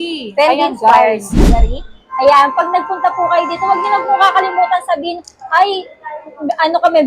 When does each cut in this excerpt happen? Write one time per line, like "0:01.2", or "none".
0:01.7